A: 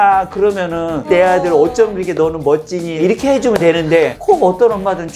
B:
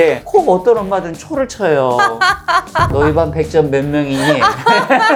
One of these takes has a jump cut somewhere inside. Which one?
A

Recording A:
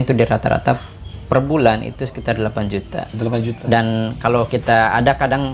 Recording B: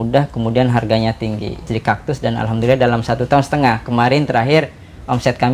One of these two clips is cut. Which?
B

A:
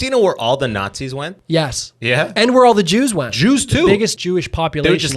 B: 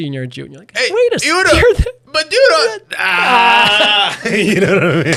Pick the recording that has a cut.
A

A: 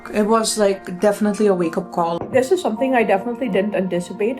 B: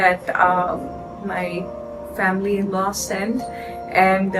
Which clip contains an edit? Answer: A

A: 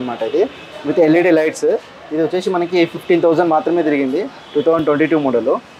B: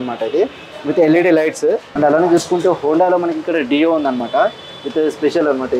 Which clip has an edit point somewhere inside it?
B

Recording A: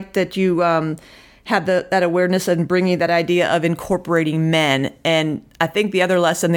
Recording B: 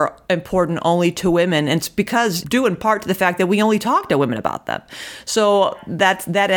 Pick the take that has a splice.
B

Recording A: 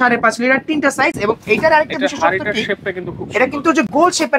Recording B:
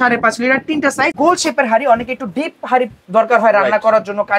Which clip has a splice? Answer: B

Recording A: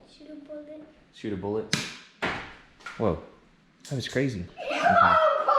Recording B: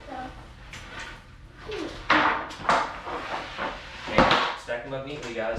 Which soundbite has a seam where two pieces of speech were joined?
A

